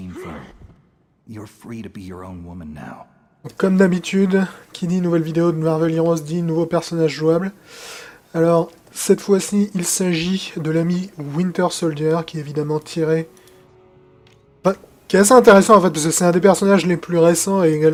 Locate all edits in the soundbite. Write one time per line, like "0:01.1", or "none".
none